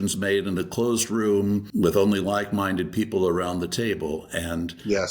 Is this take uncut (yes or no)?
no